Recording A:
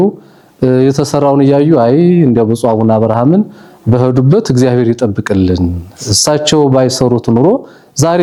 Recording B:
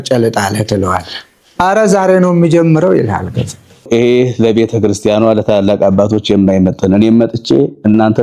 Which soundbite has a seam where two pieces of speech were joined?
B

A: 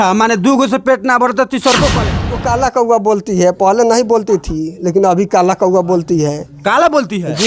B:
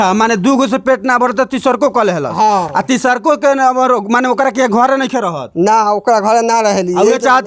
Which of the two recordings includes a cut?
A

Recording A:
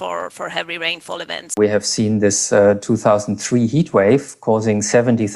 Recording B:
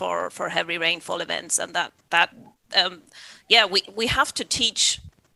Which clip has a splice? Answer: A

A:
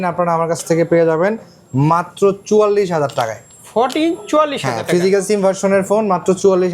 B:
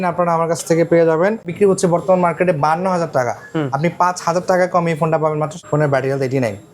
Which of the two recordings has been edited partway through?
B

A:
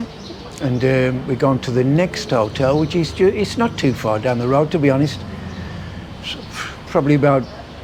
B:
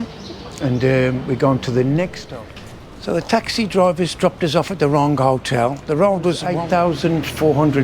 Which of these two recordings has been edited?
B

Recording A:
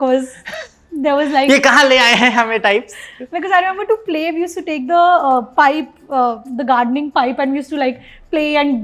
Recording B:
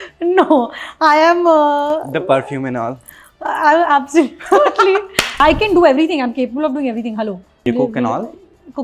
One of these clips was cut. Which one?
B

